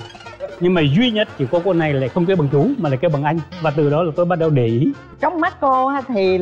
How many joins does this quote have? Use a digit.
2